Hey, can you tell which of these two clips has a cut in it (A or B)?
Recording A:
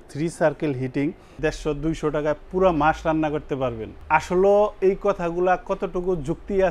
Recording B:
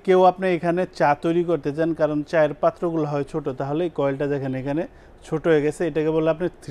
A